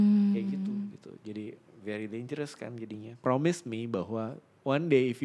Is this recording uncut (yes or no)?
no